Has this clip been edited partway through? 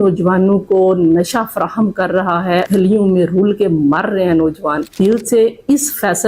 yes; 2 cuts; at 2.7 s, 4.9 s

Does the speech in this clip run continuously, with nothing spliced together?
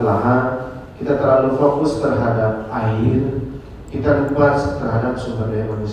yes; 0 cuts

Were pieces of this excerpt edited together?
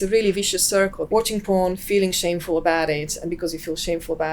yes; 1 cut; at 1.0 s

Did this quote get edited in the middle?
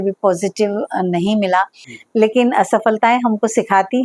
yes; 1 cut; at 1.8 s

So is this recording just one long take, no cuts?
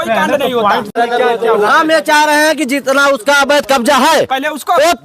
no; 1 cut; at 0.9 s

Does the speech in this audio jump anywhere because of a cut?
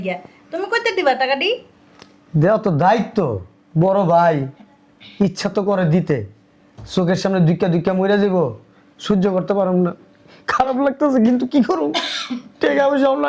no; 0 cuts

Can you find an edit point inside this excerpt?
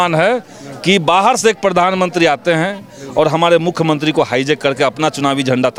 no; 0 cuts

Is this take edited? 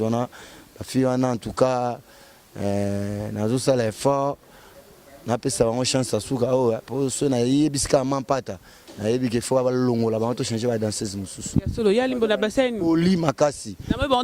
no; 0 cuts

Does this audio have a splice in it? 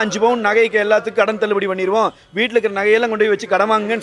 no; 0 cuts

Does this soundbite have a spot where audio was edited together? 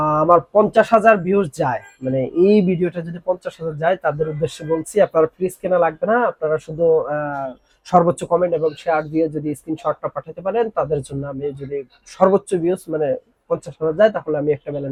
no; 0 cuts

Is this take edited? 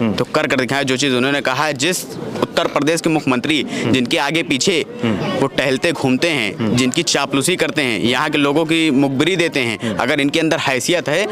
no; 0 cuts

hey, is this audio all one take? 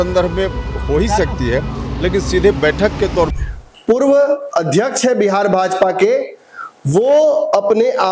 no; 1 cut; at 3.4 s

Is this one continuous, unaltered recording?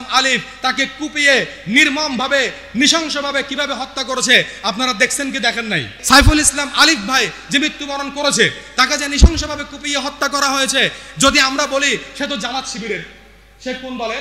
no; 1 cut; at 5.9 s

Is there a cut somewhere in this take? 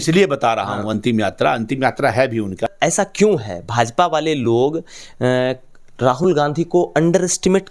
yes; 1 cut; at 2.7 s

